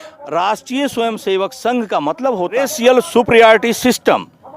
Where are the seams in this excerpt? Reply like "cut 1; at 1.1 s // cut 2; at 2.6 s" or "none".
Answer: cut 1; at 2.7 s